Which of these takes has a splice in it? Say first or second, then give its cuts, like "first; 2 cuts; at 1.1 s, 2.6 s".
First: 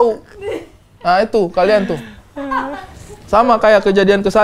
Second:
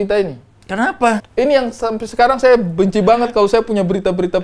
second; 1 cut; at 1.2 s